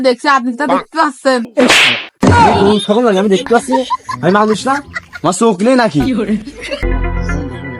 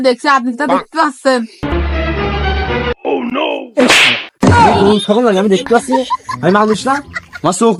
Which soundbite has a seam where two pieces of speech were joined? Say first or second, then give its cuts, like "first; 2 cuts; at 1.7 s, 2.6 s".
first; 2 cuts; at 1.5 s, 6.9 s